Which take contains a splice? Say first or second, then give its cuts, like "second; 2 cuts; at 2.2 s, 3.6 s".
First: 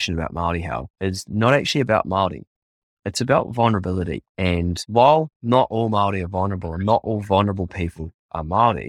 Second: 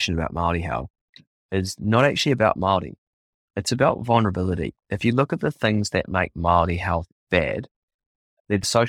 first; 2 cuts; at 0.9 s, 4.5 s